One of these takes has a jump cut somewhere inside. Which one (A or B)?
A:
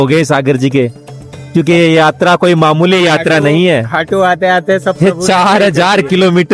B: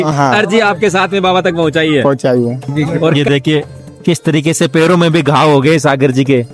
B